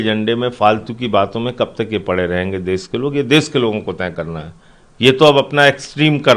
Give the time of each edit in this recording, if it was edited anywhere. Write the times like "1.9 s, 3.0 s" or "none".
none